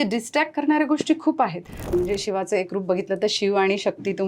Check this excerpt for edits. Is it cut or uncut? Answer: cut